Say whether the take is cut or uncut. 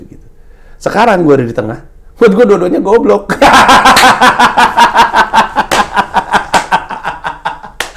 uncut